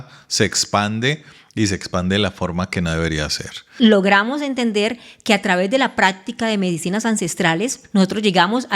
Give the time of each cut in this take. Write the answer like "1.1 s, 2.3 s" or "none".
3.7 s, 7.8 s

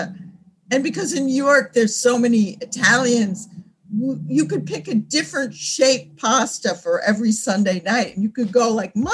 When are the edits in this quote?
none

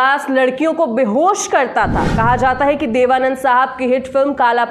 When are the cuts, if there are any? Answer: 2.1 s

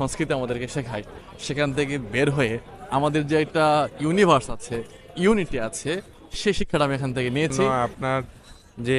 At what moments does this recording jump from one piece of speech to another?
7.7 s

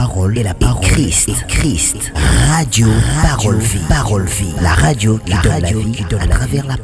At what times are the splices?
none

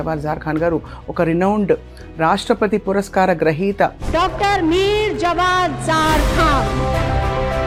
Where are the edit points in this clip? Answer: none

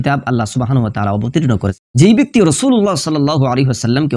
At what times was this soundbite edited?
1.8 s

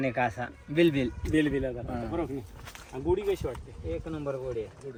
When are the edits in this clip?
none

